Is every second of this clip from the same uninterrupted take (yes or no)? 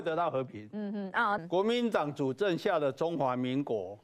no